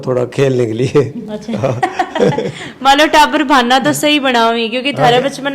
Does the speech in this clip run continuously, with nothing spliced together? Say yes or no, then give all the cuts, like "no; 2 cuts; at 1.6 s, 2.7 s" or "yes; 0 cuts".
yes; 0 cuts